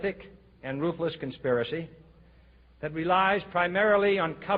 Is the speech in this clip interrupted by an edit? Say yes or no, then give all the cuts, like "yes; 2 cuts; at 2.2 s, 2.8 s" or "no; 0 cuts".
yes; 1 cut; at 1.4 s